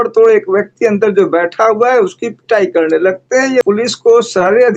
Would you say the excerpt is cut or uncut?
cut